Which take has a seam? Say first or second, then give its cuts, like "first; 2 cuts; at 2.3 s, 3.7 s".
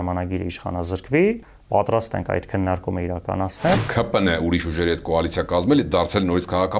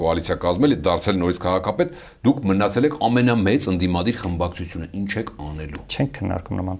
first; 2 cuts; at 1.5 s, 3.7 s